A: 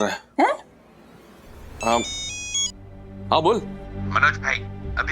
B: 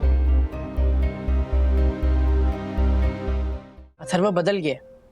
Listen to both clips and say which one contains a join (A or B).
B